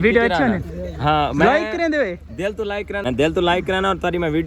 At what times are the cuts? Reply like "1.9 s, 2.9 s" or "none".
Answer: 3.0 s